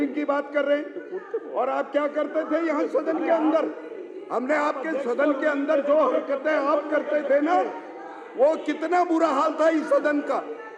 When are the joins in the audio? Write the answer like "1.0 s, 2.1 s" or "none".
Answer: none